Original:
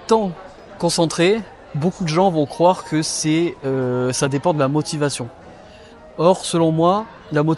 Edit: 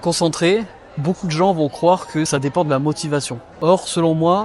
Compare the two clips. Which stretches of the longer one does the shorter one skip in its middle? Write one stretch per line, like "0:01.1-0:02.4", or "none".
0:03.1-0:04.2
0:05.3-0:06.0

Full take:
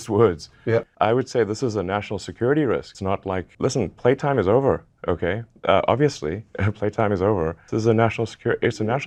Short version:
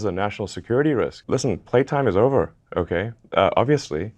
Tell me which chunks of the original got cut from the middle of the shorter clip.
0:02.9-0:03.5

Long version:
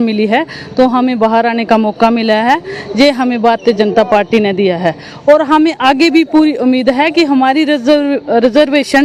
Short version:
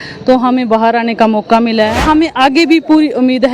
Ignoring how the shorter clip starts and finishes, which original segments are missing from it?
0:02.5-0:05.4

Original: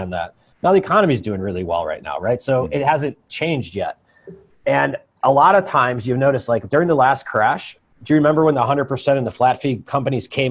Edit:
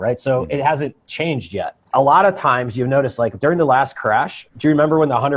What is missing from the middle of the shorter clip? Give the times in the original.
0:04.0-0:05.1
0:07.7-0:07.9

